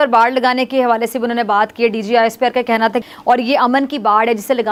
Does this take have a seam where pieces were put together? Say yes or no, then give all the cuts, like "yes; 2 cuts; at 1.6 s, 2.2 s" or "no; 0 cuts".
no; 0 cuts